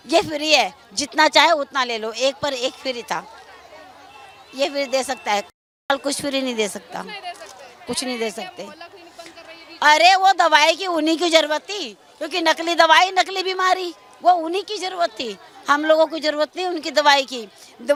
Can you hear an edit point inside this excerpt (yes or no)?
no